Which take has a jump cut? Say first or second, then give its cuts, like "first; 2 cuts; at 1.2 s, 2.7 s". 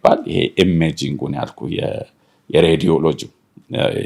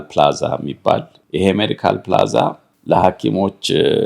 second; 2 cuts; at 1.2 s, 2.7 s